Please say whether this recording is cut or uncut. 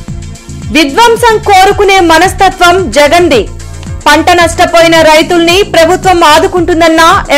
uncut